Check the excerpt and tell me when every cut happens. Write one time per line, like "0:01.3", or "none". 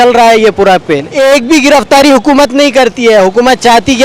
0:01.0